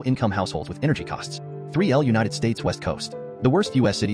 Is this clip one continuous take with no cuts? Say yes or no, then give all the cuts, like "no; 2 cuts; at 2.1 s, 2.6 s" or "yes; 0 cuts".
no; 1 cut; at 1.5 s